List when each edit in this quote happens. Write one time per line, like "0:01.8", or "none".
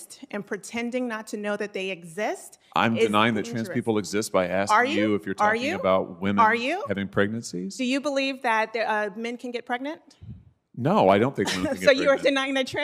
none